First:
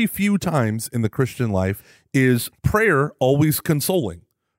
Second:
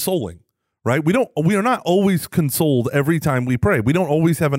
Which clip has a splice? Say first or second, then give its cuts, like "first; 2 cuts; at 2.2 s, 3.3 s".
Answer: first; 2 cuts; at 1.9 s, 2.5 s